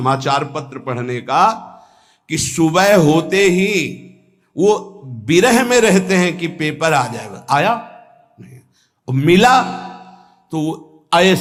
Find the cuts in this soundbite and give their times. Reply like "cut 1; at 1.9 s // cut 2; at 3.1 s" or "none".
none